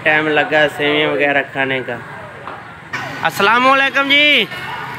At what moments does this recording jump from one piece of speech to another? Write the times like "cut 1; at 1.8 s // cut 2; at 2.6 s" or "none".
cut 1; at 2.9 s